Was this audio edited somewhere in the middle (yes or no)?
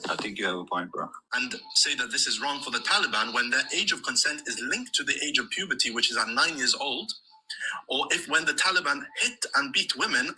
yes